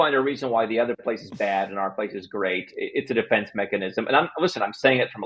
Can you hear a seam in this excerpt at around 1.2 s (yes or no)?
no